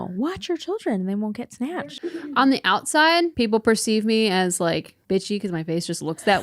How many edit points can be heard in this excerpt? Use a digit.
3